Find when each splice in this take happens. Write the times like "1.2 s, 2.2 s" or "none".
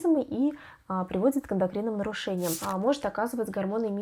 2.6 s